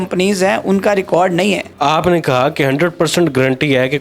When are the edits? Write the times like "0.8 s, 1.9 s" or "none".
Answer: 1.7 s